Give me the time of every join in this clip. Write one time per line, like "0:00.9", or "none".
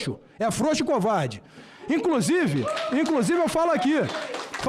none